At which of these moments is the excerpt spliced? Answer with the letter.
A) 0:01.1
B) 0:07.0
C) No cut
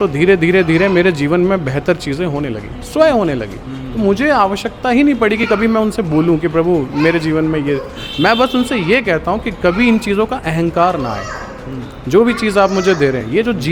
C